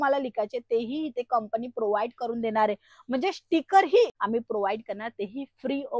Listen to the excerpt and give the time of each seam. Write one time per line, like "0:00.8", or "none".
0:04.2